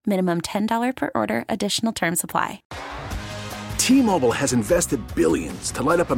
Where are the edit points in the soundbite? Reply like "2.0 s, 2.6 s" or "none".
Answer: 2.7 s